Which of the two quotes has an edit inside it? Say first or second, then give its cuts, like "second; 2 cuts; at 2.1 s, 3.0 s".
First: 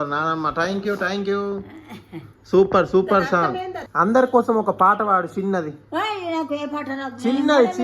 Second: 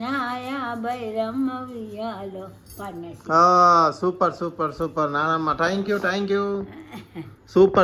first; 1 cut; at 3.8 s